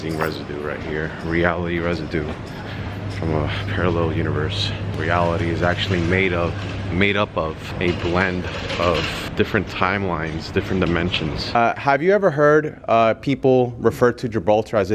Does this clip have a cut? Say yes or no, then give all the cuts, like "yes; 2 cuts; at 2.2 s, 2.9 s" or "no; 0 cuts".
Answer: yes; 4 cuts; at 4.9 s, 7.7 s, 9.3 s, 11.6 s